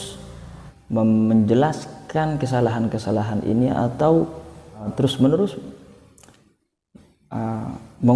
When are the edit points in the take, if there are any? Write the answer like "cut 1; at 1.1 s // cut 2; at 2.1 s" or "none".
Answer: cut 1; at 4.9 s